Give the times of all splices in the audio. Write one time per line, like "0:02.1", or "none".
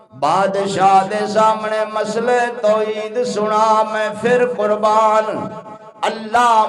none